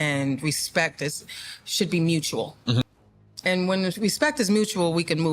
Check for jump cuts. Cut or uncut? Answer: cut